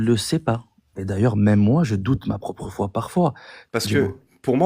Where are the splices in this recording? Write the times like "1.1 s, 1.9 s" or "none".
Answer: 1.0 s, 3.5 s

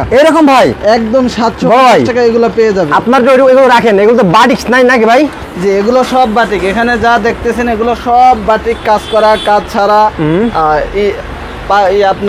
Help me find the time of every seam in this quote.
none

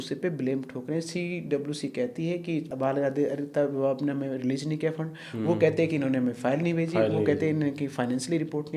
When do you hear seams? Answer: 2.7 s

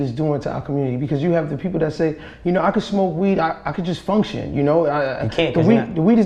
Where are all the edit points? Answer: none

